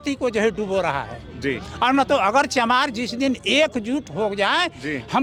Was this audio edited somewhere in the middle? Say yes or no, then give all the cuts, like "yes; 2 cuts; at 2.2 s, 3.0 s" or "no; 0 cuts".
no; 0 cuts